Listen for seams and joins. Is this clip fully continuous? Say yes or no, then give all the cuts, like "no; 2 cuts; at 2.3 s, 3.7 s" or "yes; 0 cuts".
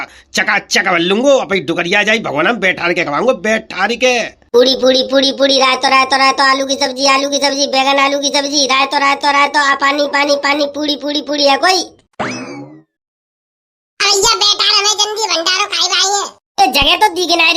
no; 1 cut; at 4.4 s